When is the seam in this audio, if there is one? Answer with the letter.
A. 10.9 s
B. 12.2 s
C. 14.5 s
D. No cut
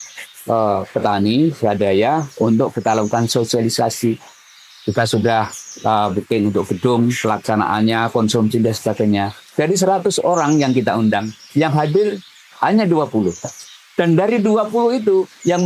D